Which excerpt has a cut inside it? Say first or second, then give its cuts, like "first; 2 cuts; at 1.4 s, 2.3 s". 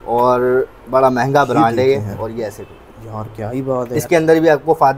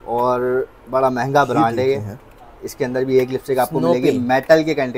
first; 2 cuts; at 2.2 s, 4.0 s